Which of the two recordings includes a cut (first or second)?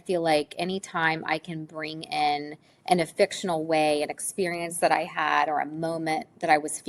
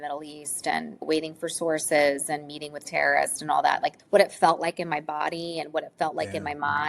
second